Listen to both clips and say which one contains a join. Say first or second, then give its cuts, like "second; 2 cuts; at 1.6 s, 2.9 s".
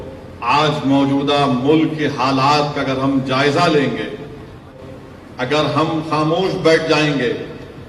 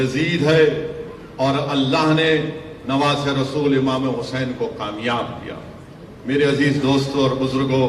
first; 1 cut; at 4.7 s